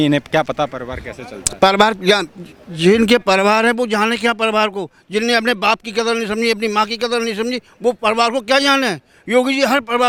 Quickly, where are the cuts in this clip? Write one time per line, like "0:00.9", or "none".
none